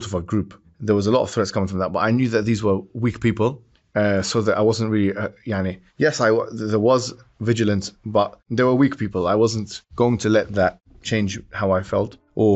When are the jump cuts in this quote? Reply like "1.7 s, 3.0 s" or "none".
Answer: none